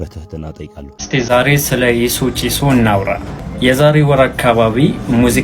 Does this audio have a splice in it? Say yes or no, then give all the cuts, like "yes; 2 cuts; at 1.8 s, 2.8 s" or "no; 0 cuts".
yes; 1 cut; at 0.9 s